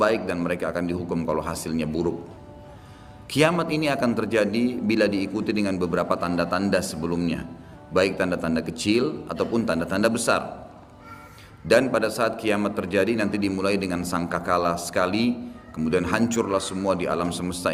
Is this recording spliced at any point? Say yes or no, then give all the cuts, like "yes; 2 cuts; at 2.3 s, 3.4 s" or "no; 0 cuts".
no; 0 cuts